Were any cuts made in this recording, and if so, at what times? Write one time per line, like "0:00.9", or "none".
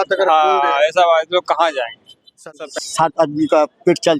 0:02.5